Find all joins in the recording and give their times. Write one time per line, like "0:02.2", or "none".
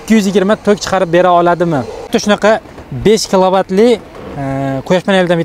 0:02.1